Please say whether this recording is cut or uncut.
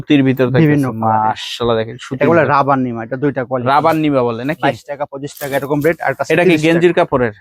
uncut